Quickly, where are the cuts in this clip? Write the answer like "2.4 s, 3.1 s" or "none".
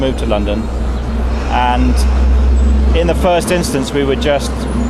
1.4 s